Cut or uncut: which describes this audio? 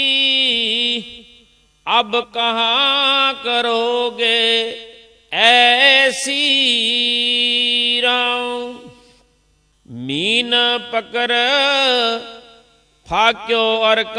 cut